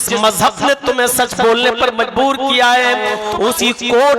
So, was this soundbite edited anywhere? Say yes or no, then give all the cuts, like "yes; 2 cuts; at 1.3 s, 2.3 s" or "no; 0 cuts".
yes; 1 cut; at 3.2 s